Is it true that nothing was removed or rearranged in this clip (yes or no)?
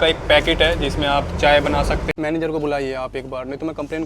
no